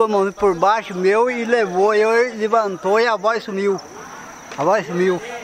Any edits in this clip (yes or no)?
no